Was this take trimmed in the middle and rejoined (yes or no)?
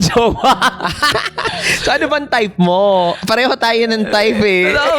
yes